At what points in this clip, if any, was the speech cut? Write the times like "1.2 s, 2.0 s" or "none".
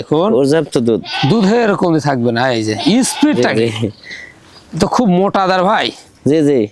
none